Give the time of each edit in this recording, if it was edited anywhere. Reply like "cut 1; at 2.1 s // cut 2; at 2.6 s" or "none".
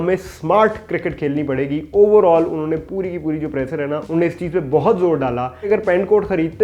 cut 1; at 5.5 s